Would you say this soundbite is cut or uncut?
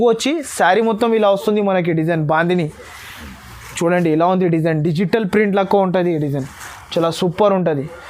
uncut